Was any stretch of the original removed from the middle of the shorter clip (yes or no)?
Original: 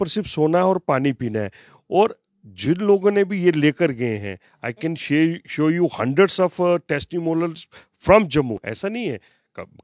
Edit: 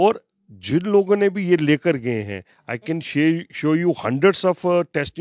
no